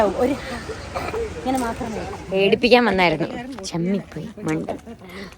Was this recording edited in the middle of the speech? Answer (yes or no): yes